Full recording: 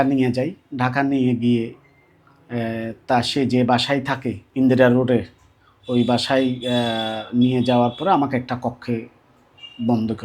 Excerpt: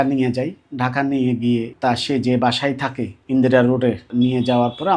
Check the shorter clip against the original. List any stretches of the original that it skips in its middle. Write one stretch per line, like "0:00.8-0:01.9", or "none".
0:01.7-0:03.0
0:05.3-0:07.2